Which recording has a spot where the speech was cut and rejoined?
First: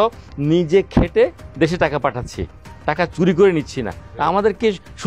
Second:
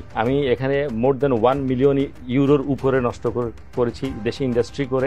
first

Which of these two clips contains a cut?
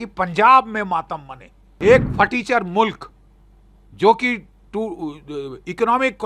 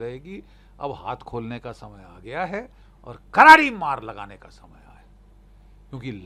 first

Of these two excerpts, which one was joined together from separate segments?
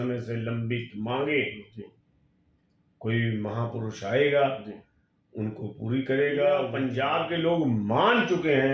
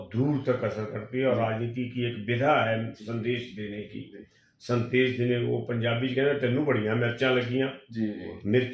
first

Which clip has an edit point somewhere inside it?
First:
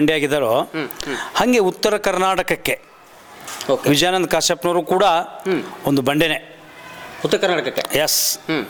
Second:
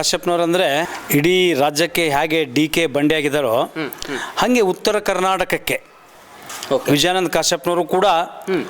second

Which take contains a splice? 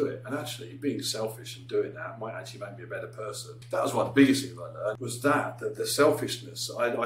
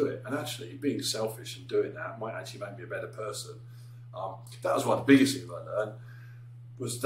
first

